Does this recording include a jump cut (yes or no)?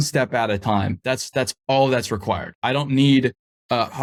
no